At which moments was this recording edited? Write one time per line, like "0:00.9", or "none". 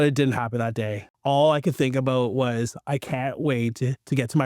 0:01.0